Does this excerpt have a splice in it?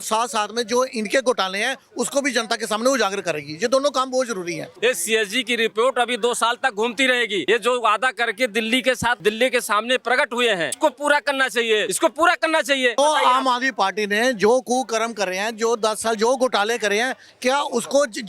yes; 6 cuts; at 4.7 s, 7.4 s, 9.2 s, 10.8 s, 11.9 s, 13.0 s

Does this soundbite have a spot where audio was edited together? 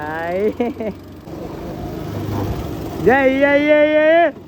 yes; 1 cut; at 1.2 s

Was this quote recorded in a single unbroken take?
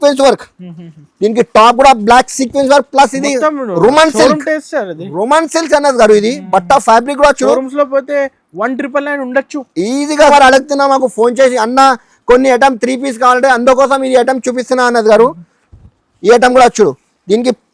no; 1 cut; at 10.3 s

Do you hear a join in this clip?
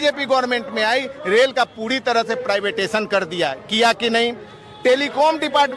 no; 0 cuts

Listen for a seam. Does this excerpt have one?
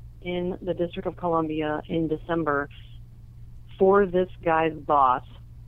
no; 0 cuts

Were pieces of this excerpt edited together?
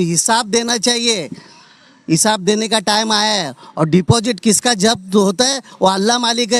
no; 0 cuts

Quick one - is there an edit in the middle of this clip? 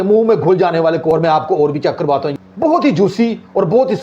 yes; 2 cuts; at 1.1 s, 2.3 s

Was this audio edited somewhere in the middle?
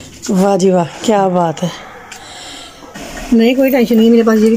yes; 1 cut; at 2.9 s

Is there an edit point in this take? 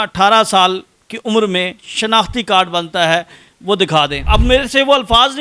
yes; 1 cut; at 4.2 s

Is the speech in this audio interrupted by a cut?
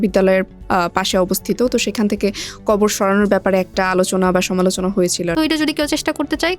yes; 1 cut; at 5.3 s

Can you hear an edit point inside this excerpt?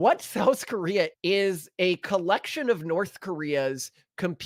no; 0 cuts

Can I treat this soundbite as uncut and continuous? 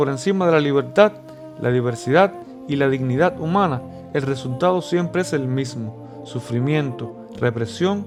yes; 0 cuts

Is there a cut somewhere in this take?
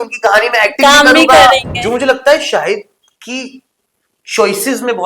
yes; 1 cut; at 1.7 s

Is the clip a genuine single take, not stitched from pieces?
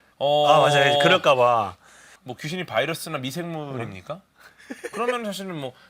yes; 0 cuts

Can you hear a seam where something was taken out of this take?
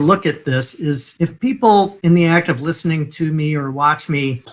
no; 0 cuts

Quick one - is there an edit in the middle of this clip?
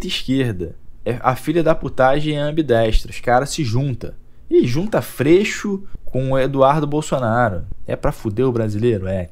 no; 0 cuts

